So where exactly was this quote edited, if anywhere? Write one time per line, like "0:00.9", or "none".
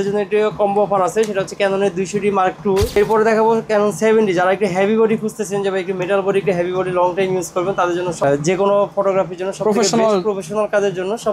0:02.9
0:08.2